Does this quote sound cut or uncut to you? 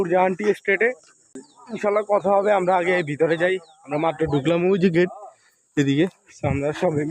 cut